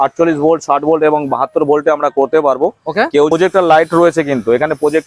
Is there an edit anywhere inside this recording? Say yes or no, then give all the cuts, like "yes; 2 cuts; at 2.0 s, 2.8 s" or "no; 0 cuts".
yes; 1 cut; at 3.3 s